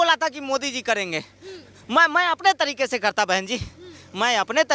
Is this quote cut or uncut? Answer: uncut